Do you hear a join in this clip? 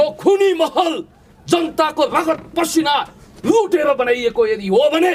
no; 0 cuts

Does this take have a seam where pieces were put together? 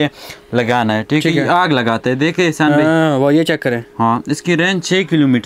no; 0 cuts

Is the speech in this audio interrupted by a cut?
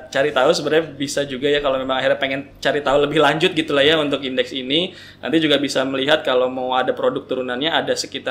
no; 0 cuts

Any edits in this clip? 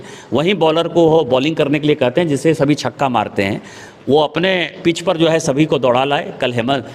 no; 0 cuts

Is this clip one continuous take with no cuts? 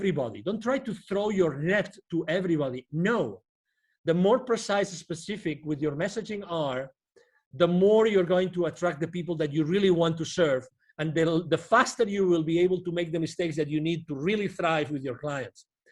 yes; 0 cuts

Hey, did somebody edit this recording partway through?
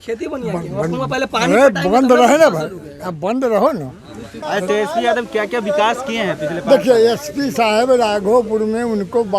yes; 1 cut; at 4.4 s

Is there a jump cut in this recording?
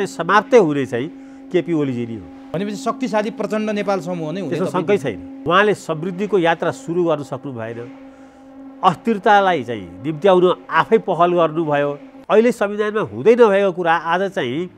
yes; 3 cuts; at 2.5 s, 5.3 s, 12.1 s

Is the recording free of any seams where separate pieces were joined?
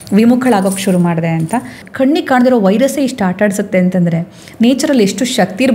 no; 1 cut; at 1.8 s

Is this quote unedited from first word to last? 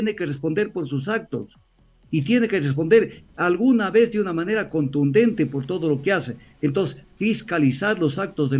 yes; 0 cuts

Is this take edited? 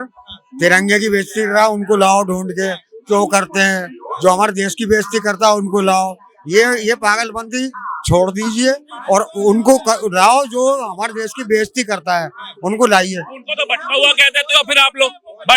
no; 0 cuts

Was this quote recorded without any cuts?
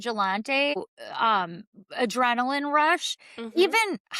no; 1 cut; at 0.9 s

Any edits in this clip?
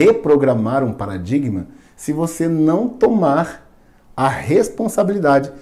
no; 0 cuts

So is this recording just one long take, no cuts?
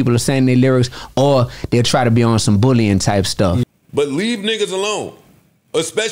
no; 1 cut; at 3.6 s

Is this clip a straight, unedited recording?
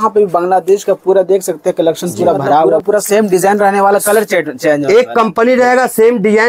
no; 1 cut; at 2.8 s

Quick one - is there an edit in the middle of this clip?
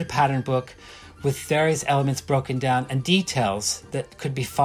no; 0 cuts

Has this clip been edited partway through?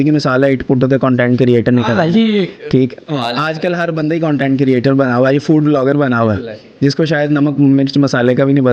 no; 0 cuts

